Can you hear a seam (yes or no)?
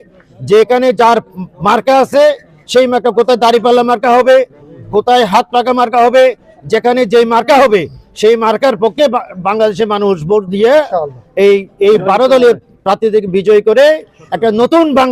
no